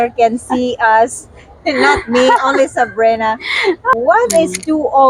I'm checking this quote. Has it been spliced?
yes; 1 cut; at 3.9 s

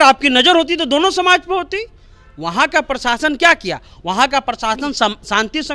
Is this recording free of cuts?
yes; 0 cuts

